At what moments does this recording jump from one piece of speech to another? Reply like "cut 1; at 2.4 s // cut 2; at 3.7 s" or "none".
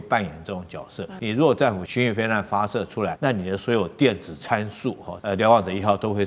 cut 1; at 1.1 s // cut 2; at 1.8 s // cut 3; at 3.2 s // cut 4; at 5.1 s